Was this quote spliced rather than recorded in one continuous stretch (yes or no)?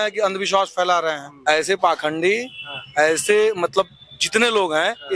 yes